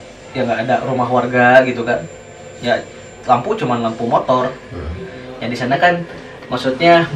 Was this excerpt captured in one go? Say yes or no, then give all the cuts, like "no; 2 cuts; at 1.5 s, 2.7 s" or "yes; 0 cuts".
yes; 0 cuts